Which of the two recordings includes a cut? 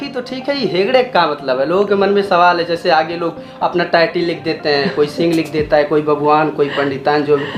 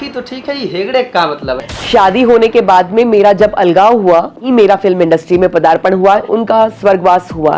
second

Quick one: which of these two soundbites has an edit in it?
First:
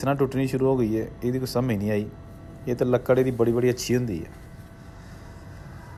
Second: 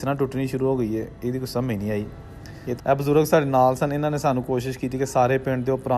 second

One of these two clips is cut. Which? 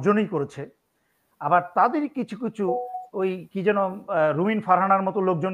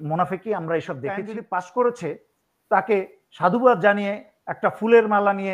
second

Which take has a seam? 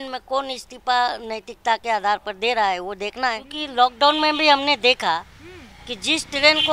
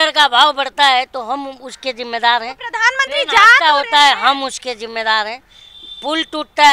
first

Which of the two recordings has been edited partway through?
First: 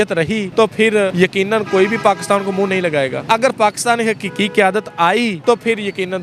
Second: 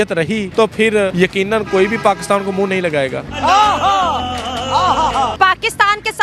second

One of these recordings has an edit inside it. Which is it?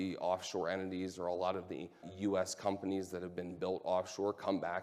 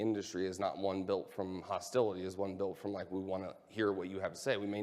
first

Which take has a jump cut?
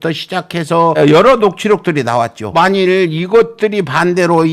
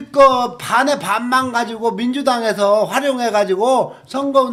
first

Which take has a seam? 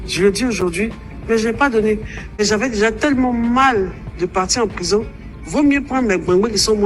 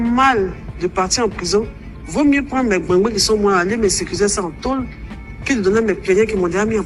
first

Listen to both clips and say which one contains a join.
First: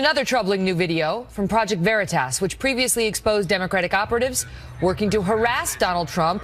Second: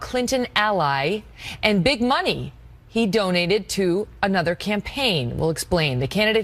second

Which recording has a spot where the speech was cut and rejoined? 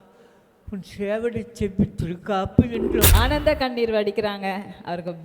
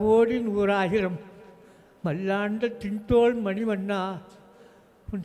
first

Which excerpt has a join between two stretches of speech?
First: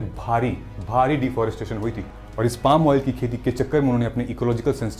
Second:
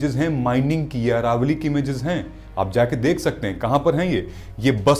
first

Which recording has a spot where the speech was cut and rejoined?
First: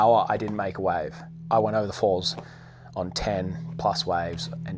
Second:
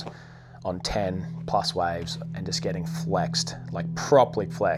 first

